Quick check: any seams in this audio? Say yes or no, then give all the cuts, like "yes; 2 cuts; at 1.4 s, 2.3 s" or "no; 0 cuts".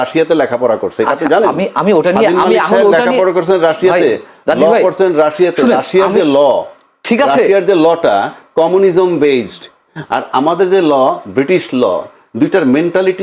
no; 0 cuts